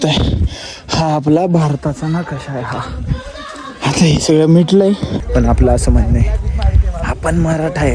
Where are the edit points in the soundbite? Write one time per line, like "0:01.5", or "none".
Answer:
0:05.2